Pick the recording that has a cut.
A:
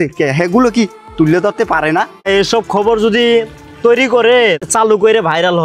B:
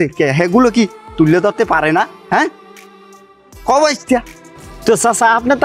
A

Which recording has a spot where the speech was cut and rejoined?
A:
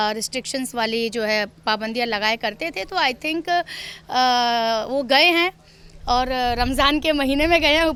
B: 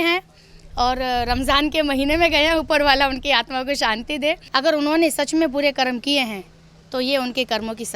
B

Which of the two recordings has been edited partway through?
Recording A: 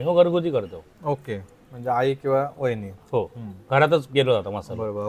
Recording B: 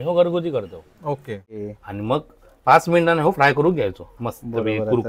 B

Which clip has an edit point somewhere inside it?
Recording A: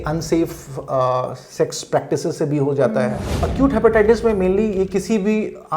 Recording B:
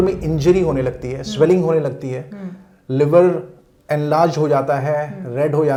A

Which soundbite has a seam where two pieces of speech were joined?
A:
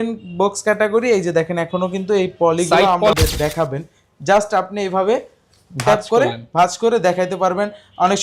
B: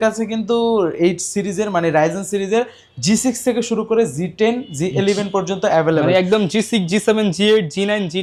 A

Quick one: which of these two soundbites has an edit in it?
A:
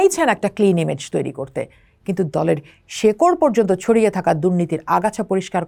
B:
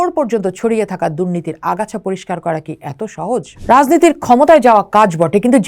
B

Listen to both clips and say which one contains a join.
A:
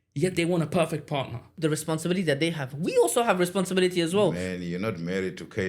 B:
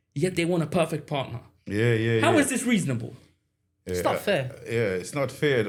A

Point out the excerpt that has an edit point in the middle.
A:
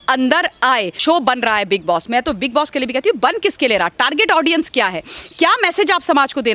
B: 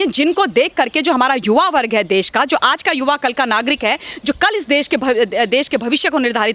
A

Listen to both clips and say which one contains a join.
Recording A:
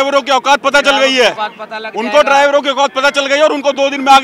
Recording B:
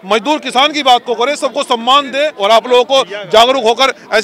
B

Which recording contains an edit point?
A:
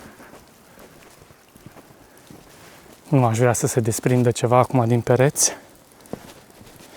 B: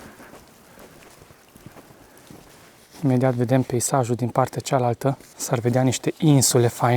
B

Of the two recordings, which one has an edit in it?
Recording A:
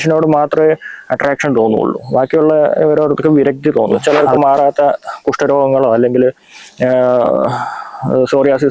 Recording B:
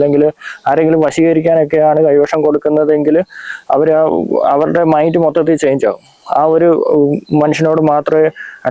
A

